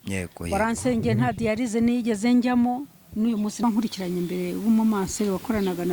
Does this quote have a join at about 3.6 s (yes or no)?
yes